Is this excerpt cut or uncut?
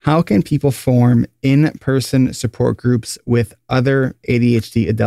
uncut